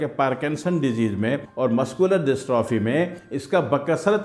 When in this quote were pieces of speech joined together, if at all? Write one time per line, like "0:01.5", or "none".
none